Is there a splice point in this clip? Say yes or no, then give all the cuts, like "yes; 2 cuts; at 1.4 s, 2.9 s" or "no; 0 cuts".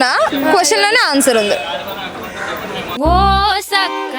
no; 0 cuts